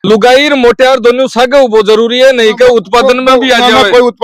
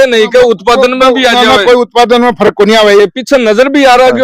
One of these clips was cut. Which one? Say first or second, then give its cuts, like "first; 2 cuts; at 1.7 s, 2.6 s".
second; 1 cut; at 3.0 s